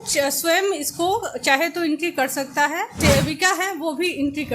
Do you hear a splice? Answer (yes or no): yes